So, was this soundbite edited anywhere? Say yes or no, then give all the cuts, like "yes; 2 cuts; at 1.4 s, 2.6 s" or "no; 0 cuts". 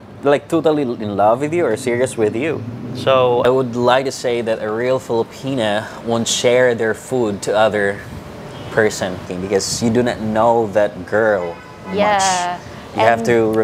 yes; 2 cuts; at 3.4 s, 9.3 s